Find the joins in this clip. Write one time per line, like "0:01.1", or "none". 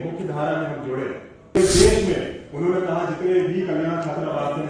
0:01.6